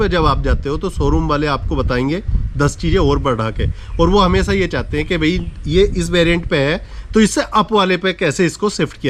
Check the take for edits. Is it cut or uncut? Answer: uncut